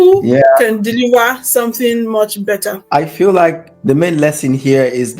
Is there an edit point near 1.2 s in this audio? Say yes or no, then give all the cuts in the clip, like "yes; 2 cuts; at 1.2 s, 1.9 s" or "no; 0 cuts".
no; 1 cut; at 2.8 s